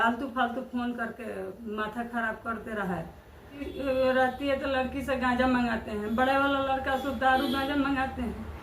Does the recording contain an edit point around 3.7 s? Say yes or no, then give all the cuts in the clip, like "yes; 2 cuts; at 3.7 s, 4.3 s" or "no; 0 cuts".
yes; 1 cut; at 3.7 s